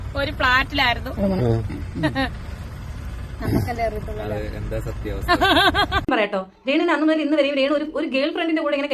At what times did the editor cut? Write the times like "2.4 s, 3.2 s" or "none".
6.0 s